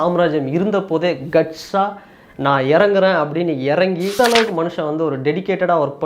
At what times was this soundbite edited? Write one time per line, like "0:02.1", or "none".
0:04.2